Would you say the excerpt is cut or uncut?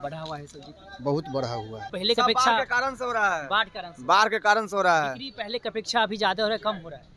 cut